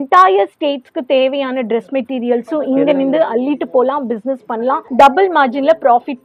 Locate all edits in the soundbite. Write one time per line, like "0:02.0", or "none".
none